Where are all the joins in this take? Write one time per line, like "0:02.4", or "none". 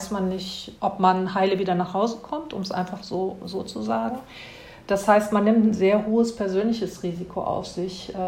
none